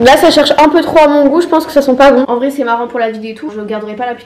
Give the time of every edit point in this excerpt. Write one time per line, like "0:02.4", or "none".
0:02.3
0:03.5